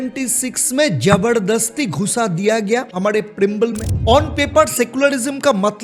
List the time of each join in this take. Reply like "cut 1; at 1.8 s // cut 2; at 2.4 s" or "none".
cut 1; at 2.9 s // cut 2; at 3.9 s